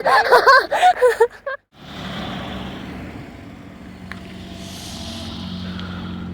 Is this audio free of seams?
no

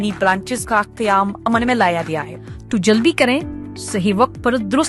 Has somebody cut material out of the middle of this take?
yes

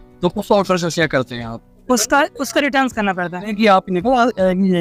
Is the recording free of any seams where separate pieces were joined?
no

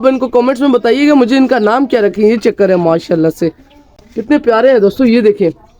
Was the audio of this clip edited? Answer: no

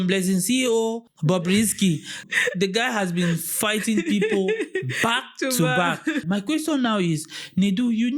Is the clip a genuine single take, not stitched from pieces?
no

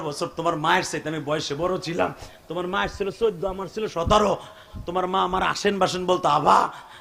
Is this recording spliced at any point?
no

